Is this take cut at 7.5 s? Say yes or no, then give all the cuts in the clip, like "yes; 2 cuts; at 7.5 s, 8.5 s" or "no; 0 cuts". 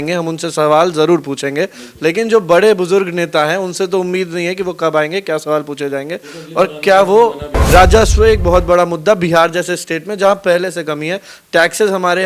yes; 1 cut; at 7.5 s